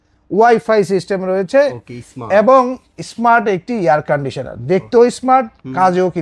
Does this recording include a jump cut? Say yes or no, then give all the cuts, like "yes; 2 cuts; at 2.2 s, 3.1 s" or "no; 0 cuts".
no; 0 cuts